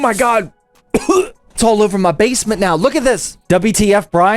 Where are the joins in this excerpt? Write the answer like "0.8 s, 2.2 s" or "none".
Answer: 1.6 s, 3.3 s